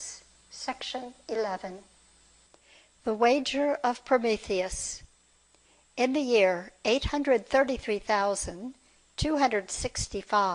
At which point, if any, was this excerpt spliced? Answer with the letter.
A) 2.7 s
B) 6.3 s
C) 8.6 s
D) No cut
B